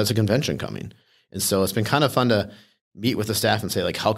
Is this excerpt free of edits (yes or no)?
yes